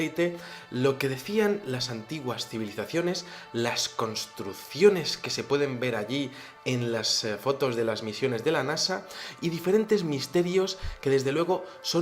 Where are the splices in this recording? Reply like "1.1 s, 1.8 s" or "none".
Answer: 1.9 s